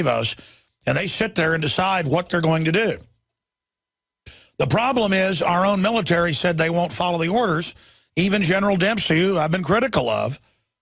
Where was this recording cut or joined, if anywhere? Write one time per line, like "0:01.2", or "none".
none